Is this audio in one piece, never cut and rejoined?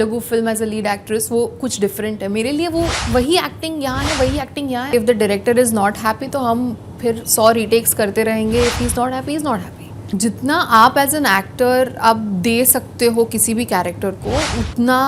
no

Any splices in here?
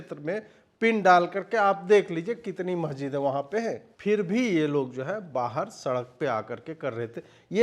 yes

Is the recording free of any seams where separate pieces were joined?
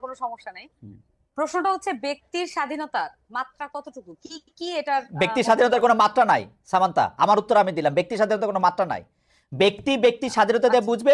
yes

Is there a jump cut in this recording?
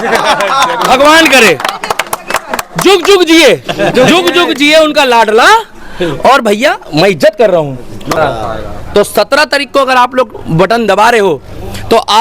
yes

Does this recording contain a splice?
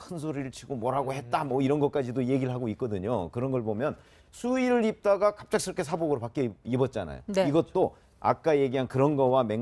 yes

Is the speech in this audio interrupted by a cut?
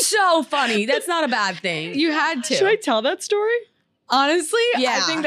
yes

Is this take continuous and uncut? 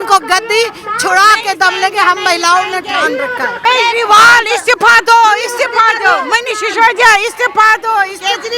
no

